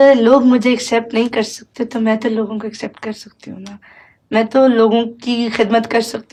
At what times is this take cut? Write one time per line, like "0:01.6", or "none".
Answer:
none